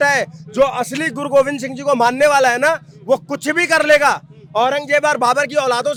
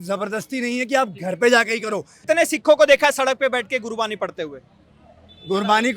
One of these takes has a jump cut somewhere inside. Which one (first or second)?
second